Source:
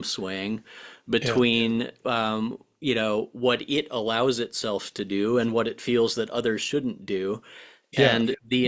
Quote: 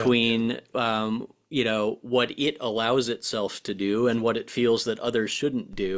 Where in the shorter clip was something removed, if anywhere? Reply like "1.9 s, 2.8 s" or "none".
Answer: none